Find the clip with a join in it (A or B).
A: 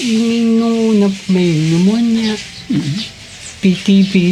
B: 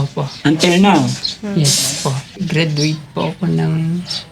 B